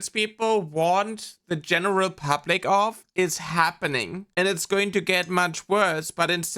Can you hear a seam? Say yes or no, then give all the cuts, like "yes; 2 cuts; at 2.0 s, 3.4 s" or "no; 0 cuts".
no; 0 cuts